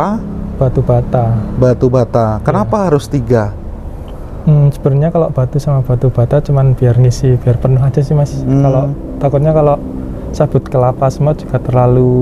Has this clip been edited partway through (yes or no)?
no